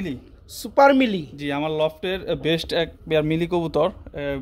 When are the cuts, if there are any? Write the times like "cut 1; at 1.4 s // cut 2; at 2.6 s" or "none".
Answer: none